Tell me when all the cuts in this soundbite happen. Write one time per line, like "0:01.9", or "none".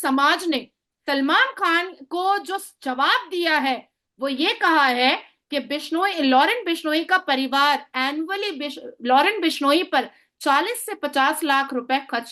none